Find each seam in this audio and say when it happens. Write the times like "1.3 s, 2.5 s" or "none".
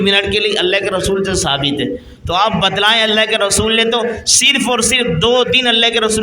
none